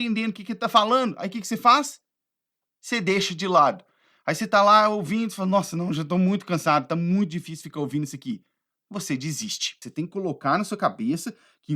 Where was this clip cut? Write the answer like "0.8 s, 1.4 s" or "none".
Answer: 9.8 s